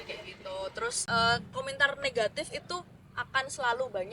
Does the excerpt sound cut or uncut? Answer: cut